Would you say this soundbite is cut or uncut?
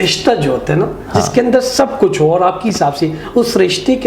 uncut